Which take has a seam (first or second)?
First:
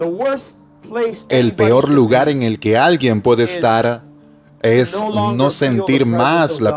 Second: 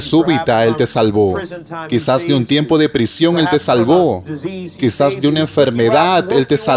first